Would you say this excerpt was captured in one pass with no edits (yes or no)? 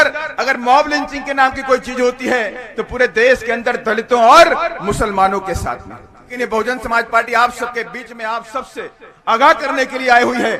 no